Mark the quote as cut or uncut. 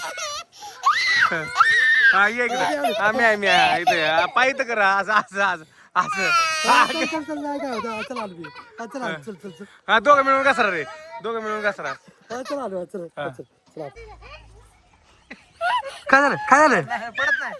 cut